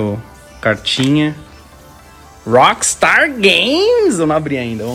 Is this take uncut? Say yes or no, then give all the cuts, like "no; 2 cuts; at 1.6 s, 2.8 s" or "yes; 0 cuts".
yes; 0 cuts